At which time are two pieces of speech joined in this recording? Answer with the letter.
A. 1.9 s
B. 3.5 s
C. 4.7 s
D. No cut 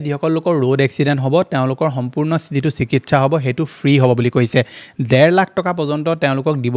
D